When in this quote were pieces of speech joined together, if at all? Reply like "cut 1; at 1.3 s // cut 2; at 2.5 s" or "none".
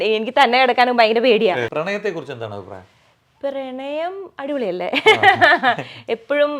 cut 1; at 1.7 s